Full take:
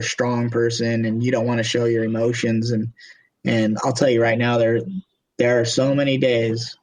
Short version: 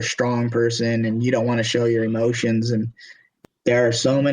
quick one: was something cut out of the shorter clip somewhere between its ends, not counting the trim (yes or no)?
yes